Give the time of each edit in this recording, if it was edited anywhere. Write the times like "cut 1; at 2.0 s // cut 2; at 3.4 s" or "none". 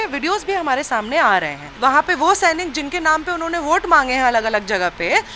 cut 1; at 1.6 s